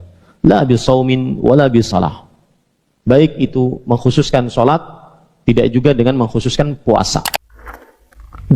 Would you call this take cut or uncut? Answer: cut